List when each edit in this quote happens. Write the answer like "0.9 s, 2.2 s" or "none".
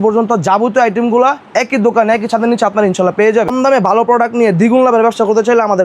3.5 s